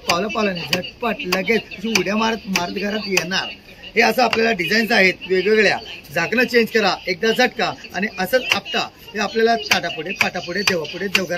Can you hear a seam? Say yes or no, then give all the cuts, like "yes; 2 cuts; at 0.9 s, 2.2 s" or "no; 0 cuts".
no; 0 cuts